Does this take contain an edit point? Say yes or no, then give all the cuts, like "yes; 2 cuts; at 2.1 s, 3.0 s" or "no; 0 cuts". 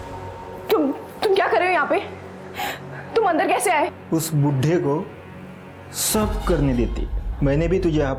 no; 0 cuts